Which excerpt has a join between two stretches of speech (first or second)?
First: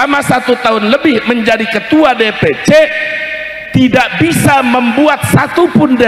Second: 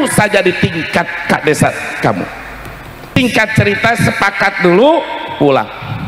second